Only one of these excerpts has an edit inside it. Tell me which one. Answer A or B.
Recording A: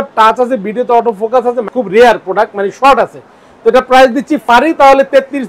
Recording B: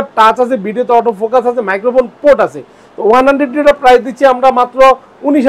A